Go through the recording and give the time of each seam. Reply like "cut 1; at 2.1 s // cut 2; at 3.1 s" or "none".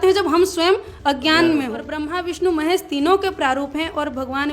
cut 1; at 2.0 s